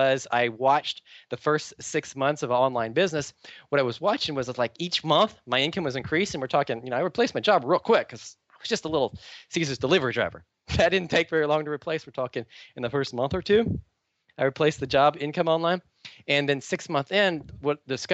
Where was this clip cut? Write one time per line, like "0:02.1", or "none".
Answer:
none